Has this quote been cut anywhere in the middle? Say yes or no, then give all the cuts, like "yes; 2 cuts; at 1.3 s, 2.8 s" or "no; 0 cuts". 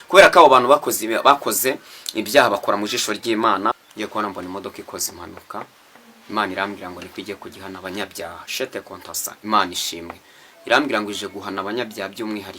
yes; 1 cut; at 3.7 s